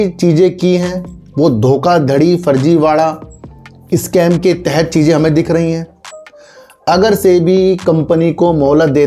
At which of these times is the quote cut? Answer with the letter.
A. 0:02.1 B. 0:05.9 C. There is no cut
C